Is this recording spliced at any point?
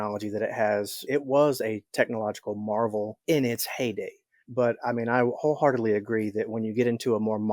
yes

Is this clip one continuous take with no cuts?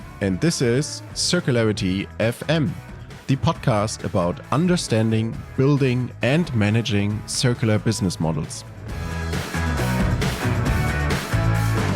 yes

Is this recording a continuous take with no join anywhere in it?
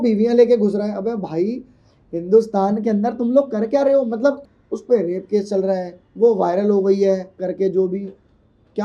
no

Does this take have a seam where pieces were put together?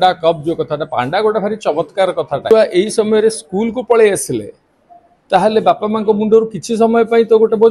yes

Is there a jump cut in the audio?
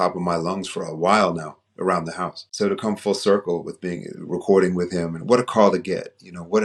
no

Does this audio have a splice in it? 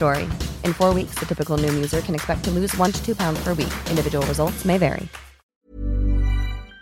yes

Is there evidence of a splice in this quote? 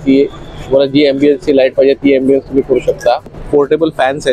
yes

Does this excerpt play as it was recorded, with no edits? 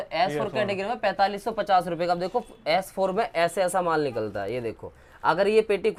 yes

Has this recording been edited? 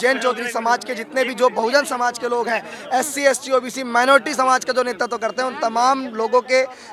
no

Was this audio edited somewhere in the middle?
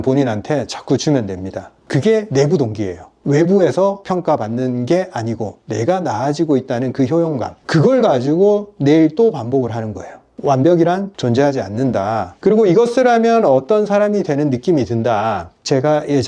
no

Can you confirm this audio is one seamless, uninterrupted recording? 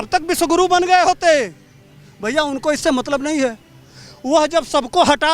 yes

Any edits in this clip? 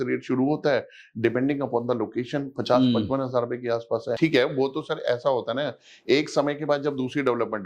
yes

